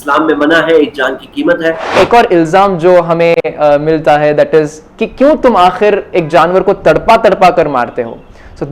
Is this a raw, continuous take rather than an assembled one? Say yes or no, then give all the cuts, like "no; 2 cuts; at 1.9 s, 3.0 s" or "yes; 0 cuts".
no; 1 cut; at 1.8 s